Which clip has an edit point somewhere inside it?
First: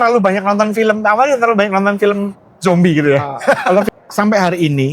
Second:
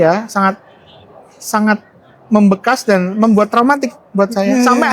first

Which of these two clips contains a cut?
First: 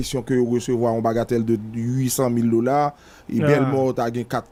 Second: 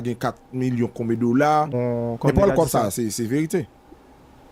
second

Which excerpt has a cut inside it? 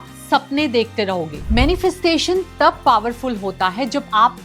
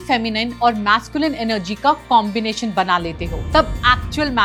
first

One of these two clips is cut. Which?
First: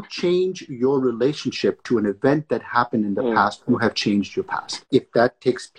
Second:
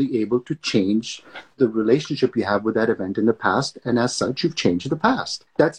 first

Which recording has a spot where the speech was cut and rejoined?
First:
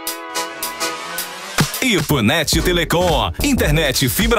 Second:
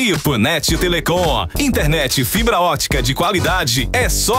first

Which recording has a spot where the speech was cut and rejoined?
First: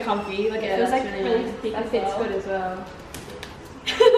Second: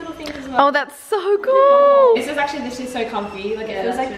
second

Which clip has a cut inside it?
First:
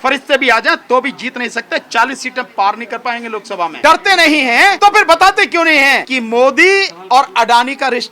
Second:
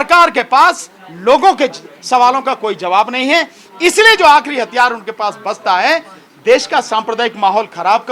first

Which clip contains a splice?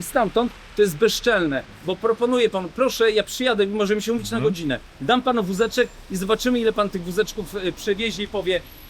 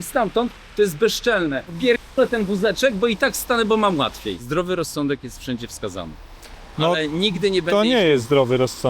second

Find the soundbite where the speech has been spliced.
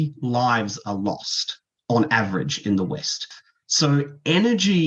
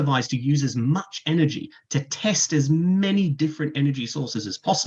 first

